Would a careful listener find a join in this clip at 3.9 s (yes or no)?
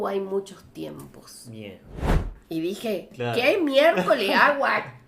no